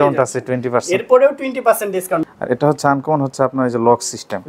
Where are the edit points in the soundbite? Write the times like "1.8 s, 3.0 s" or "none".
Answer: 2.2 s

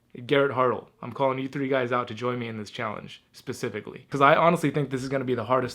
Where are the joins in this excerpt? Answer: 4.1 s

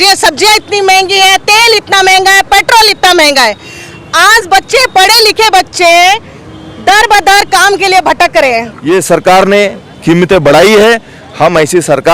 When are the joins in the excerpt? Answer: 8.7 s

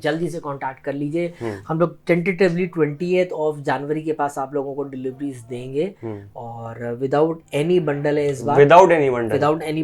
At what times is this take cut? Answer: none

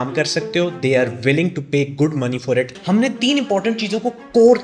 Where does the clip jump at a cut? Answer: 2.8 s

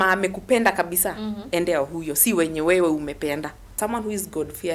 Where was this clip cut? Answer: 3.8 s

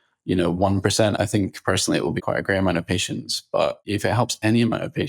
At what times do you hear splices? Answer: 1.2 s, 2.2 s, 3.8 s

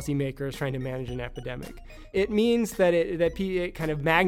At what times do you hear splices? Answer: 2.1 s

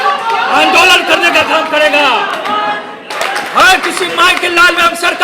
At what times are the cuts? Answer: 3.1 s

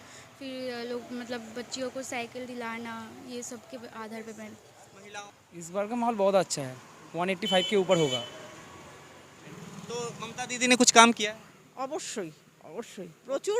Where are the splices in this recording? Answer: 5.2 s, 9.5 s

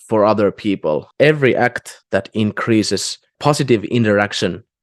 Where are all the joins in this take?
1.1 s

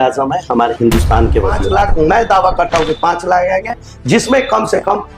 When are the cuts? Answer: 1.6 s

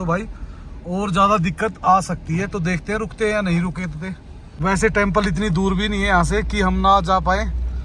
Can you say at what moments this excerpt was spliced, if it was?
none

